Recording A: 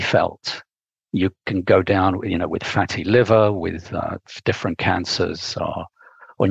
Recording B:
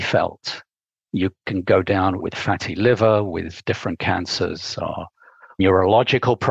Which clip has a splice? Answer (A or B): B